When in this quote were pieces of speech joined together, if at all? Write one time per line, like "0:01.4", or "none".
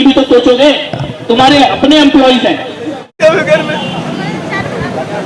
0:03.2